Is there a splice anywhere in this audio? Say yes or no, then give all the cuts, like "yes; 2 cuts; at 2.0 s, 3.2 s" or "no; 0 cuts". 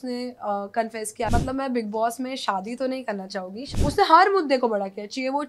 yes; 2 cuts; at 1.3 s, 3.6 s